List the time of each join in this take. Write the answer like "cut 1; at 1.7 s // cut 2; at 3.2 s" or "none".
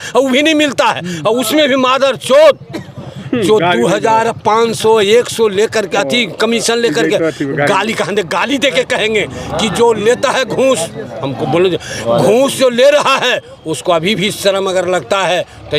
none